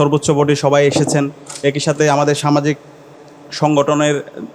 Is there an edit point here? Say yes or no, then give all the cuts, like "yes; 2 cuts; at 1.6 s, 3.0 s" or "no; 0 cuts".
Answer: no; 0 cuts